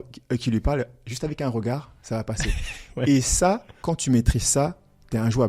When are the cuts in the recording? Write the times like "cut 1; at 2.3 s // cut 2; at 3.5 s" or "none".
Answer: cut 1; at 3.7 s